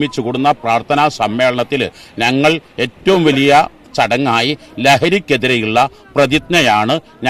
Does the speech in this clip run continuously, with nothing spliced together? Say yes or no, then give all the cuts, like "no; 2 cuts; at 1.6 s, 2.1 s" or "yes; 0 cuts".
yes; 0 cuts